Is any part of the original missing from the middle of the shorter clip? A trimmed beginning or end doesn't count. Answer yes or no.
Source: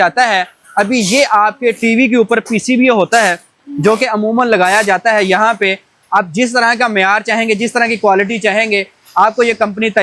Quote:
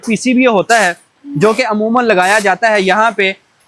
no